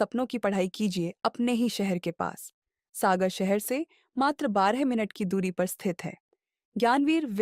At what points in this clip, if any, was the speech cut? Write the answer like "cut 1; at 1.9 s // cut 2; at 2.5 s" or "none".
none